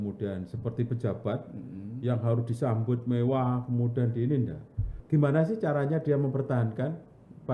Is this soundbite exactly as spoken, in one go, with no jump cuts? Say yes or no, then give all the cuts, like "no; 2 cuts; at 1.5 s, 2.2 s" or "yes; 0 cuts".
no; 1 cut; at 5.0 s